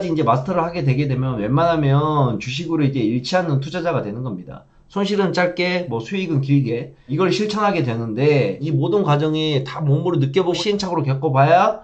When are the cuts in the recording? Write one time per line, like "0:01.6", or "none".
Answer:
none